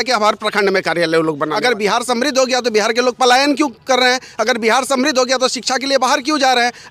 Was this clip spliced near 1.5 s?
yes; 1 cut; at 1.5 s

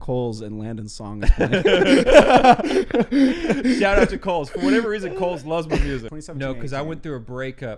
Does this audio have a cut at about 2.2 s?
no; 1 cut; at 6.1 s

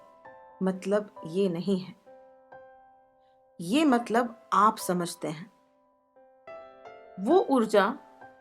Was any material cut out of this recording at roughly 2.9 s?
no; 1 cut; at 6.5 s

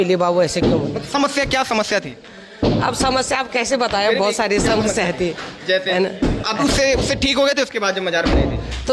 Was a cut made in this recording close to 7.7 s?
no; 1 cut; at 6.4 s

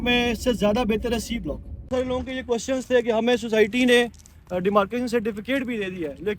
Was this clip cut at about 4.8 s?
no; 1 cut; at 1.9 s

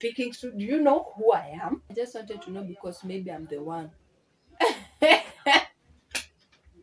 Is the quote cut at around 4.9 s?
no; 1 cut; at 1.9 s

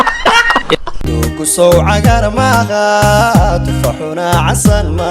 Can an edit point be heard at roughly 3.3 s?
no; 1 cut; at 0.9 s

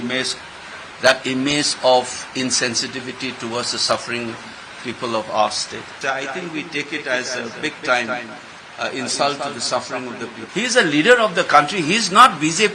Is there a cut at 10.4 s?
yes; 2 cuts; at 6.0 s, 10.4 s

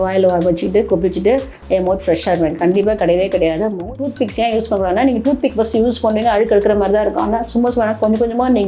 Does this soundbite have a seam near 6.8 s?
no; 1 cut; at 3.8 s

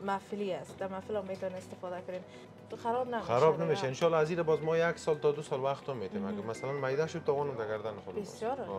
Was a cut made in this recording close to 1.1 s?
no; 1 cut; at 2.4 s

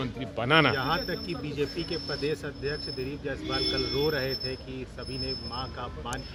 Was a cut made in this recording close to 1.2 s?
no; 0 cuts

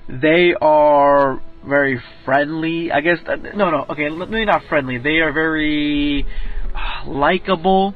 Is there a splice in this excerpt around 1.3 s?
no; 1 cut; at 4.6 s

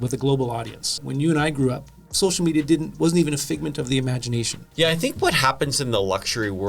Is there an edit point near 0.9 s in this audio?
yes; 2 cuts; at 0.9 s, 4.6 s

